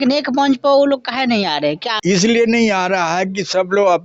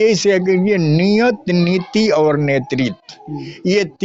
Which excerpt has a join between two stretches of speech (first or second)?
first